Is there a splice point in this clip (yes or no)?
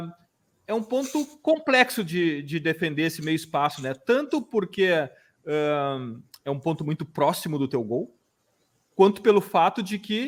no